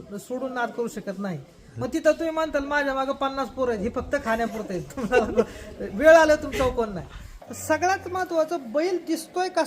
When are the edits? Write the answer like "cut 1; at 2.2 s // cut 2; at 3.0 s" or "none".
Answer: cut 1; at 7.3 s